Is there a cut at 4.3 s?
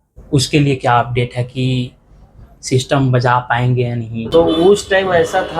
yes; 1 cut; at 4.3 s

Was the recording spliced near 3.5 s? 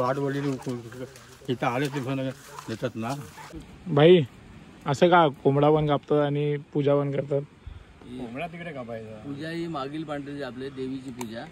yes; 1 cut; at 3.5 s

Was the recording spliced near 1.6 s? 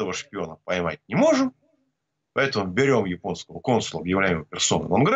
no; 0 cuts

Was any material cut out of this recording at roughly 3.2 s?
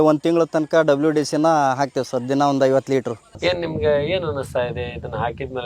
yes; 1 cut; at 3.2 s

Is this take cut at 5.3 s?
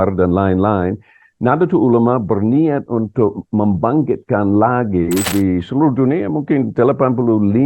yes; 1 cut; at 5.3 s

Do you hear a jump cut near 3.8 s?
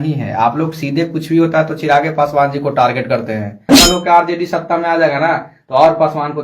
yes; 1 cut; at 3.8 s

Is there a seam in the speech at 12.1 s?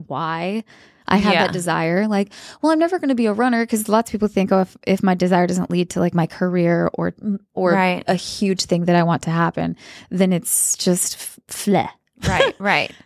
no; 0 cuts

